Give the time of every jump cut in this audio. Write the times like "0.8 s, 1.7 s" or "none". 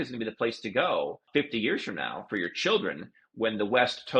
1.2 s